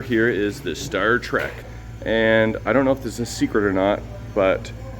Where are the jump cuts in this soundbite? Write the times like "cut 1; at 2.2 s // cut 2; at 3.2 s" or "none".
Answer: cut 1; at 1.5 s